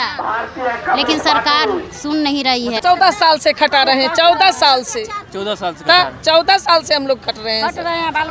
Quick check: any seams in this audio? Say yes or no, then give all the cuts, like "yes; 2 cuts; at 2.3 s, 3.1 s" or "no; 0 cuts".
yes; 1 cut; at 2.8 s